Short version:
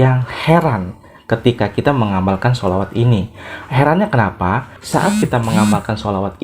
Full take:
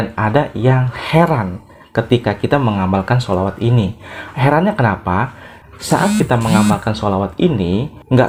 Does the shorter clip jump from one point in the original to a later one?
yes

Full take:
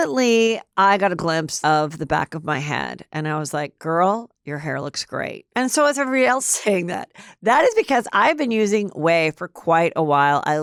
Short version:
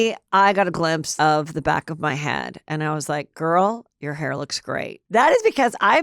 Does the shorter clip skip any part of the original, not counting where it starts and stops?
yes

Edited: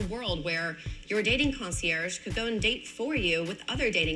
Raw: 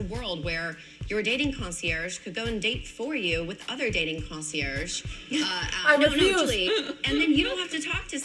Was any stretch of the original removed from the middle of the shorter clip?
no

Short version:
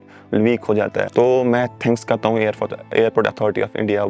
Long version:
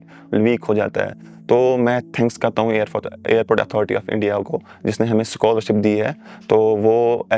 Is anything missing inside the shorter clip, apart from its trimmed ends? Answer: yes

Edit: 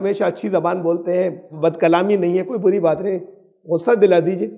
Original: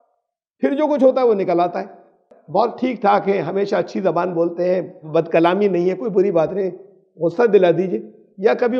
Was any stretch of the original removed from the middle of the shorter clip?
no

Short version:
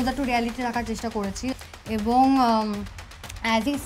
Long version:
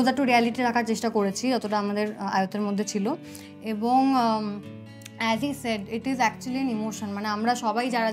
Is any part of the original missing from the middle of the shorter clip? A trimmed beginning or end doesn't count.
yes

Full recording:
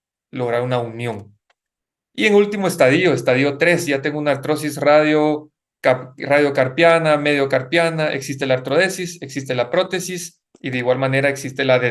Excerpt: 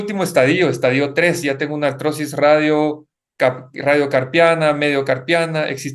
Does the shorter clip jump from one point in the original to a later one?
no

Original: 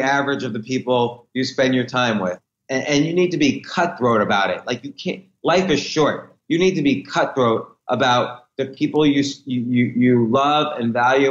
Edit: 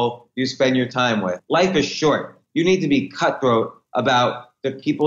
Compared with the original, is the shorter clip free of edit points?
no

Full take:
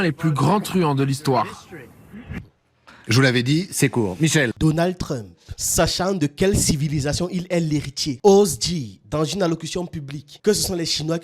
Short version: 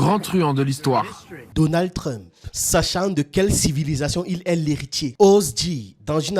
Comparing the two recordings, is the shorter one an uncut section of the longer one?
no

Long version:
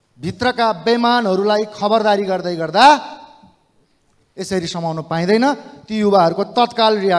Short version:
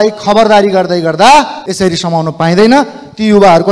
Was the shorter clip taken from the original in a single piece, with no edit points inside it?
no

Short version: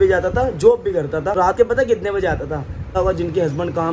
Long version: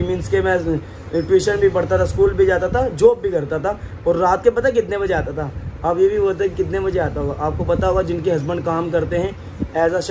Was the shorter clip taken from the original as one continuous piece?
no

